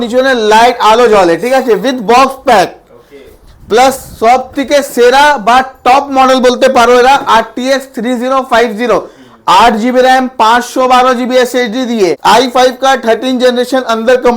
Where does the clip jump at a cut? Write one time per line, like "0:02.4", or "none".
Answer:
0:12.2